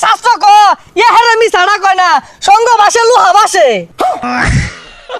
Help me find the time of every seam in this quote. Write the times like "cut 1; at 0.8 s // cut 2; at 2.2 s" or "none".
cut 1; at 4.2 s